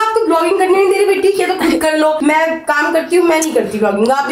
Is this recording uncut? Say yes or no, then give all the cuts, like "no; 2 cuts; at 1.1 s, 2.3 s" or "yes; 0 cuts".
yes; 0 cuts